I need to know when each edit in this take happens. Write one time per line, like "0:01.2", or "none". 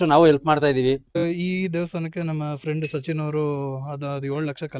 0:01.2